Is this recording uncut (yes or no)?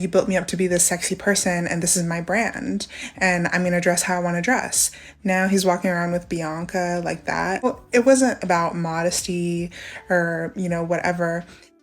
no